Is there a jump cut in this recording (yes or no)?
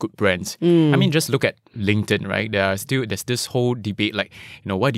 no